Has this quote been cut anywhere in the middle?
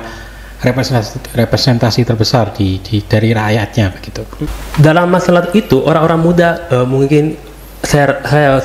yes; 1 cut; at 4.6 s

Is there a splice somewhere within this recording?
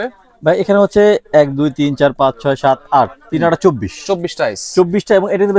no; 0 cuts

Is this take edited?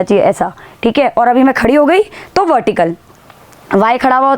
no; 0 cuts

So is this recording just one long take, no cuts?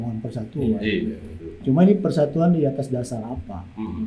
yes; 0 cuts

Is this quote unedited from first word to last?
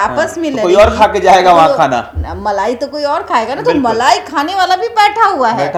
yes; 0 cuts

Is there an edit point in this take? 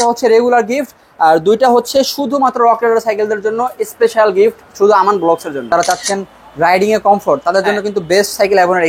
yes; 1 cut; at 6.0 s

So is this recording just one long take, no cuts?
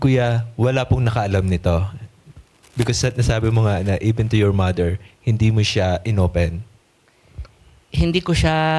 yes; 0 cuts

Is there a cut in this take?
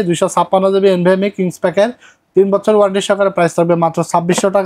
no; 0 cuts

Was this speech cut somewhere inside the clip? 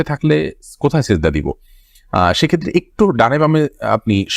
no; 0 cuts

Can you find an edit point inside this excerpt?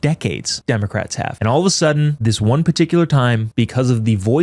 yes; 3 cuts; at 0.8 s, 2.2 s, 3.4 s

